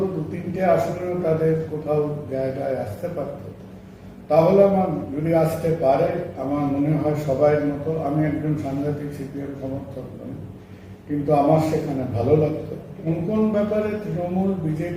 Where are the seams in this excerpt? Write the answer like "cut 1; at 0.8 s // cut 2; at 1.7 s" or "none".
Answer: cut 1; at 13.0 s